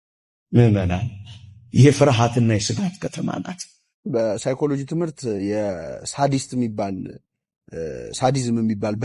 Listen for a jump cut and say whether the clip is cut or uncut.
cut